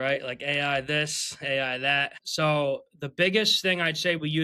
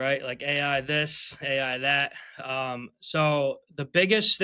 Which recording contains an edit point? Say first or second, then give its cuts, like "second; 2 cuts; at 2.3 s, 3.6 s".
first; 1 cut; at 2.2 s